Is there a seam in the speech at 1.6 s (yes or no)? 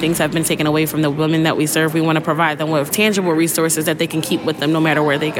no